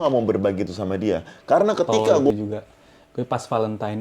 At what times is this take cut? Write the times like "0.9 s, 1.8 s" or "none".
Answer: 2.4 s